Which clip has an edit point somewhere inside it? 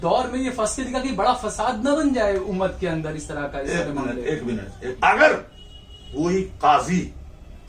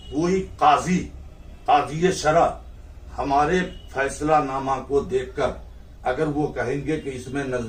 first; 1 cut; at 4.7 s

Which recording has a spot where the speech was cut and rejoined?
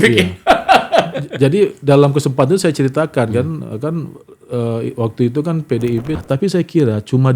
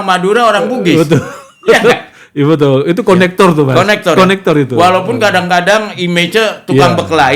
first; 1 cut; at 6.2 s

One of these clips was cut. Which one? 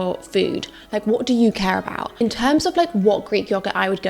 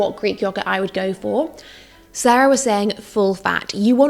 first; 1 cut; at 2.0 s

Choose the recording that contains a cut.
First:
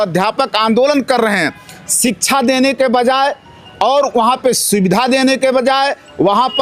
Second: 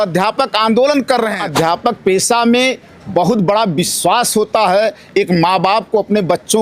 second; 1 cut; at 1.4 s

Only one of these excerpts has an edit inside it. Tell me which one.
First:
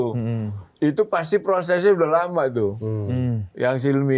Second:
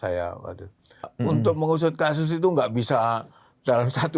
second; 1 cut; at 1.1 s

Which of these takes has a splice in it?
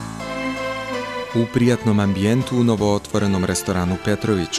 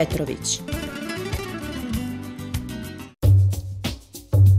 second; 1 cut; at 3.0 s

